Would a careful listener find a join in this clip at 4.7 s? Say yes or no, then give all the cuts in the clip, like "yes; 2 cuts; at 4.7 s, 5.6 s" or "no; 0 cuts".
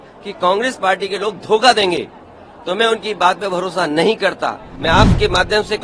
yes; 1 cut; at 4.7 s